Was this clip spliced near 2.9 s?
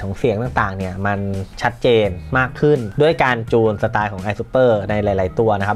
yes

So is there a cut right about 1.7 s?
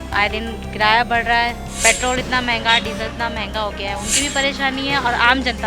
yes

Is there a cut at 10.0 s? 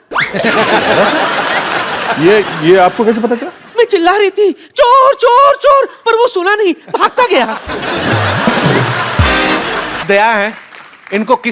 yes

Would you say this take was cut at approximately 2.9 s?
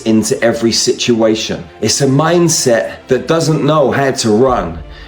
yes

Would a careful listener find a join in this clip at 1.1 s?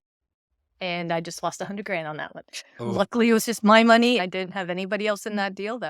no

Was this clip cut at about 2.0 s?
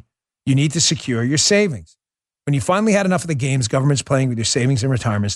no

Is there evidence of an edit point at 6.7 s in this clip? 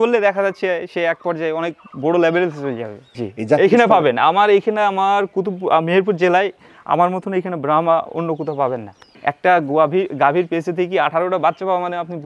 no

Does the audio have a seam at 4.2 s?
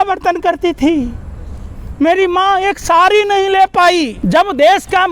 yes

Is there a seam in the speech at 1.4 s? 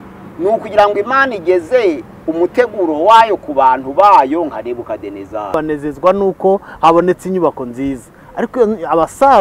no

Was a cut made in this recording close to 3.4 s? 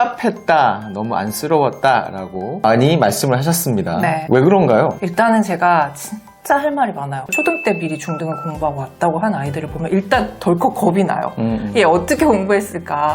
no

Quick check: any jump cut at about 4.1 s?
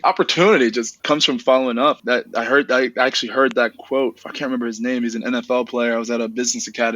no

